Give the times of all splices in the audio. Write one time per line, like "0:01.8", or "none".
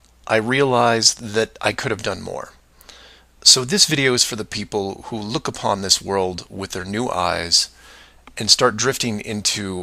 0:04.2